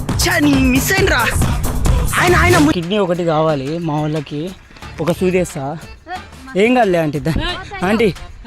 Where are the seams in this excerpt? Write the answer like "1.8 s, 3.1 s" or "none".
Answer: 2.7 s, 4.7 s